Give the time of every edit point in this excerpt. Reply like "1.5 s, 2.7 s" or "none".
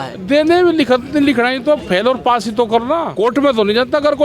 3.1 s